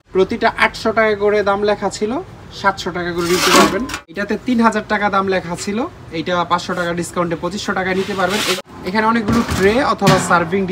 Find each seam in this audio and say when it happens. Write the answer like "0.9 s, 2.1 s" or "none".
4.2 s, 8.6 s